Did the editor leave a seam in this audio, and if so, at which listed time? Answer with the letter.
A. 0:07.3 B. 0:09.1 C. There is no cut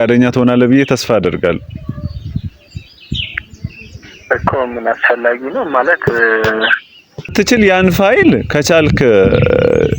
A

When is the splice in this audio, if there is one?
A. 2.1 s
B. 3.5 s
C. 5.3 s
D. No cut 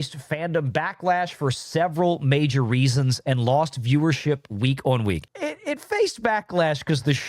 C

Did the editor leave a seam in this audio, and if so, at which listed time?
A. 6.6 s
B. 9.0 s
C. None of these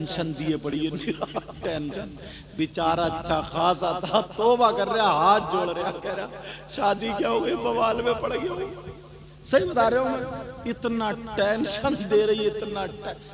C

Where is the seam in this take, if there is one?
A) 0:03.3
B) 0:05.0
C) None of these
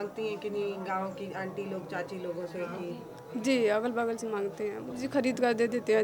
B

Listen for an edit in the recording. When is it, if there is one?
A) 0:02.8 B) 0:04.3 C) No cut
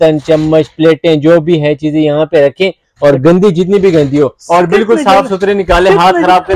C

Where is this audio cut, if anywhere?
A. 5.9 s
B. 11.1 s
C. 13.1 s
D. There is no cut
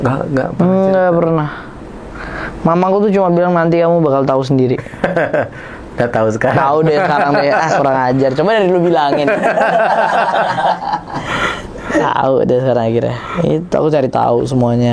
D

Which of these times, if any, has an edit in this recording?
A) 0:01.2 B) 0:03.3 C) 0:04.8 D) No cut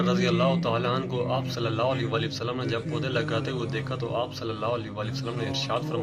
D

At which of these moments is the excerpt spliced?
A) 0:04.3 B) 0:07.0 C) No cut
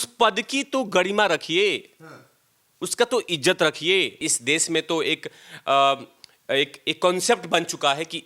A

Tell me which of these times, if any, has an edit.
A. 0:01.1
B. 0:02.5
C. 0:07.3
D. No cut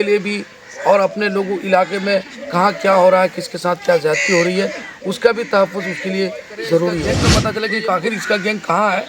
C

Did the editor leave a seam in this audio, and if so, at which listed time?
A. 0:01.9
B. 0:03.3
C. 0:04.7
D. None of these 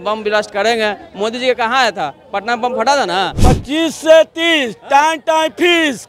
B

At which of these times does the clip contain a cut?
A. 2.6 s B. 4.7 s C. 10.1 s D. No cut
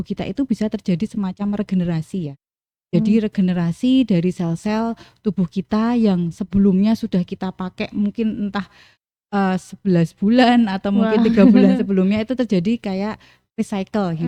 D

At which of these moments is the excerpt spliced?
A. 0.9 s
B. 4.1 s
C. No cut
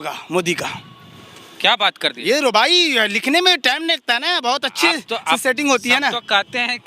C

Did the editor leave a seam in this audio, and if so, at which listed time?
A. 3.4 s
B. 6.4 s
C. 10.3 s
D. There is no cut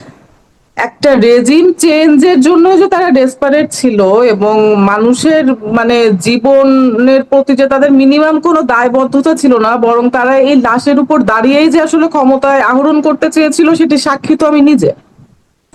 D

